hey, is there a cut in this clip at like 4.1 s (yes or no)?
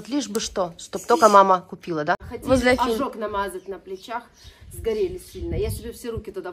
no